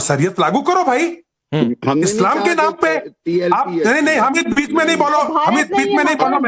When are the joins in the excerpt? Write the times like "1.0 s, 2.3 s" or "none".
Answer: 4.5 s